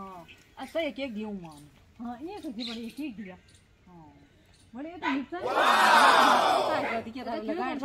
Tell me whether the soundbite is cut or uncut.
cut